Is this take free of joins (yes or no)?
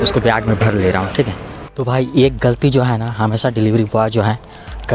no